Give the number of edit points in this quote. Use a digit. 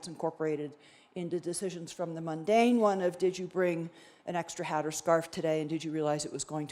0